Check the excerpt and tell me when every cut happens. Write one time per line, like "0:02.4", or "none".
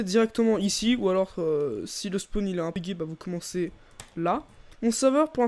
0:02.8
0:04.4